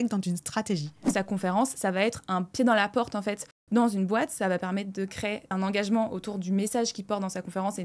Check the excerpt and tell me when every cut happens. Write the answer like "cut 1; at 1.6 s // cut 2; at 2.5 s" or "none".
cut 1; at 1.1 s // cut 2; at 5.5 s